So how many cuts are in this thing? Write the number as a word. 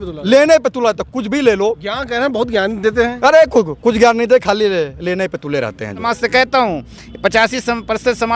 one